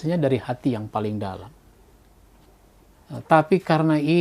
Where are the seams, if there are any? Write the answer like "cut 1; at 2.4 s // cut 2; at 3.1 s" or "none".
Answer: cut 1; at 2.9 s